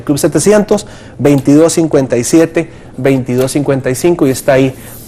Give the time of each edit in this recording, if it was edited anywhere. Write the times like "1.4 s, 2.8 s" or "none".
3.4 s

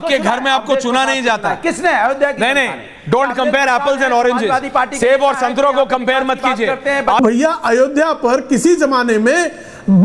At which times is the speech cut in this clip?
7.2 s

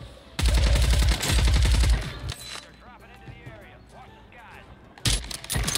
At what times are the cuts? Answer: 2.3 s

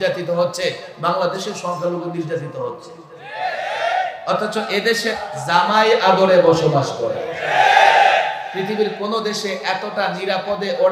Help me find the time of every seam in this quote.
5.1 s

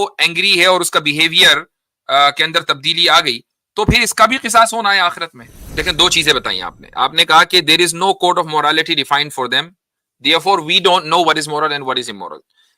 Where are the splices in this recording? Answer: 5.7 s

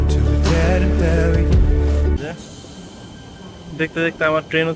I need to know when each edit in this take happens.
2.2 s

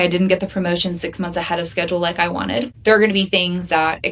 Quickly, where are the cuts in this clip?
2.7 s

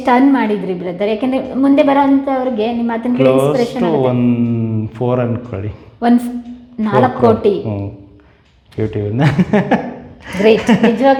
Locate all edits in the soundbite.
none

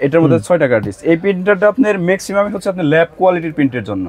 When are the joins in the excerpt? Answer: none

